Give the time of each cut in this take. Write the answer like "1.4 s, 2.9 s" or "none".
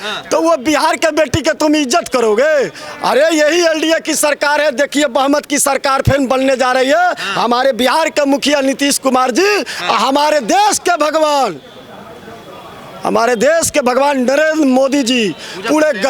none